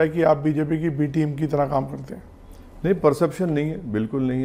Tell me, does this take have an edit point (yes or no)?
no